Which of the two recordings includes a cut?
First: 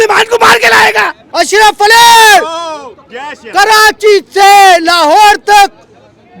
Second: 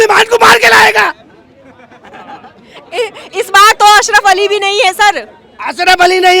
first; 1 cut; at 1.2 s

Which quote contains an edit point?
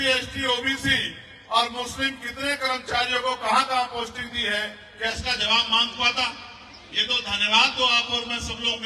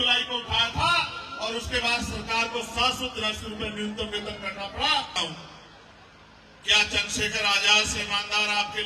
second; 1 cut; at 5.1 s

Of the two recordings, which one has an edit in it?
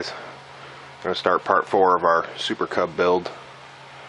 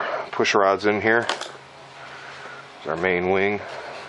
second; 1 cut; at 2.3 s

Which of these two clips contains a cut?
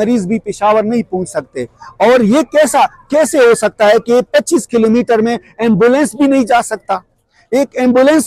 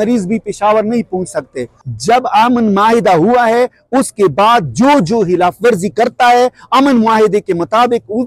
second; 1 cut; at 1.8 s

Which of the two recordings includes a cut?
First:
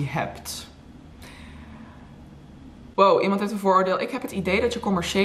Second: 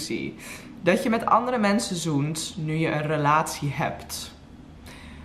first; 1 cut; at 2.8 s

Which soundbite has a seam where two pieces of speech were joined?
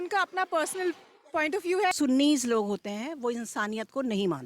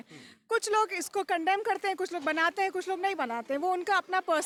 first; 1 cut; at 1.9 s

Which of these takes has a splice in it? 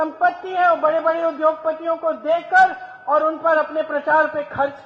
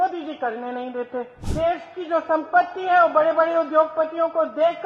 second; 1 cut; at 1.4 s

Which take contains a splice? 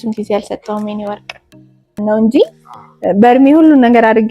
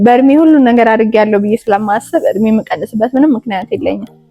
first; 1 cut; at 2.0 s

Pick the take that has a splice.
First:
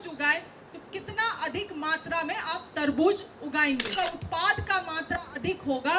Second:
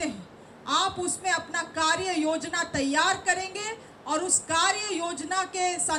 first; 1 cut; at 3.9 s

